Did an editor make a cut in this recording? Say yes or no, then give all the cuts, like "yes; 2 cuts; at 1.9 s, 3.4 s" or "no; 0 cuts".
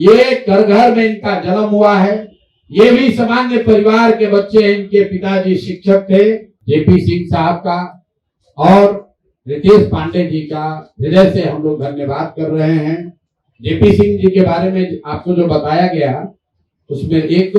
yes; 1 cut; at 6.5 s